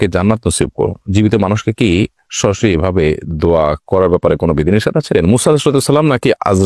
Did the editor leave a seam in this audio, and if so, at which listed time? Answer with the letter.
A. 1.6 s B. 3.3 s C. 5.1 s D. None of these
C